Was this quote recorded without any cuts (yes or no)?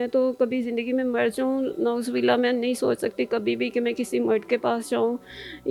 yes